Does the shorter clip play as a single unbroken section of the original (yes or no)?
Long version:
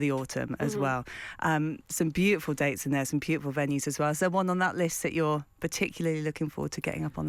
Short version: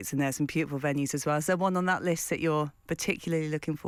yes